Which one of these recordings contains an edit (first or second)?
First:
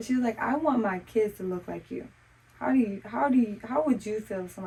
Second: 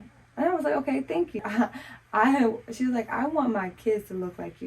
second